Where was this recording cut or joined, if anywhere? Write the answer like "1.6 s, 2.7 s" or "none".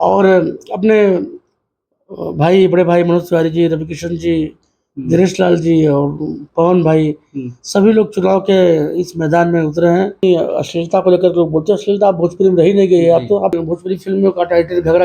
10.2 s, 13.6 s